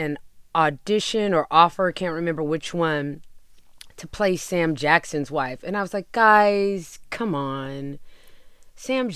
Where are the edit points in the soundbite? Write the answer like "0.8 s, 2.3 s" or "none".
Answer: none